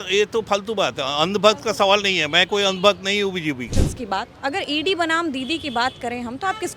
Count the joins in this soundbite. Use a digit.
1